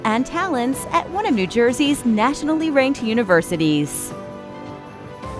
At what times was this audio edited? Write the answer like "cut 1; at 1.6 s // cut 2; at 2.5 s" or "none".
cut 1; at 3.9 s